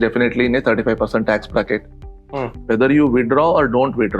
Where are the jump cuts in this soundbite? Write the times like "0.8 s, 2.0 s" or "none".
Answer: 2.5 s